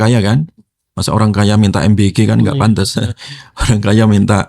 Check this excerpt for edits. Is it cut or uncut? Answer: uncut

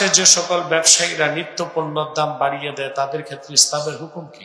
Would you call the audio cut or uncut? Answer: uncut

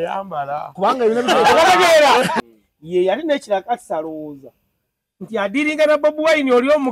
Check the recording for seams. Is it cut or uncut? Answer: cut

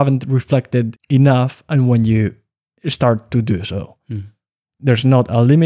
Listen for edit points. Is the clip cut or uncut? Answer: cut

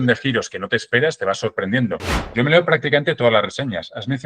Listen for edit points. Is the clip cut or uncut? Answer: cut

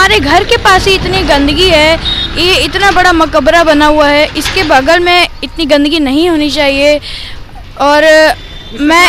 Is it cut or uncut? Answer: uncut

